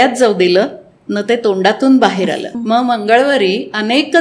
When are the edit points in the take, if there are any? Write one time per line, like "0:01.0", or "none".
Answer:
0:02.5